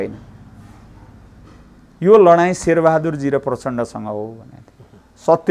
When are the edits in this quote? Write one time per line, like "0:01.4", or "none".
none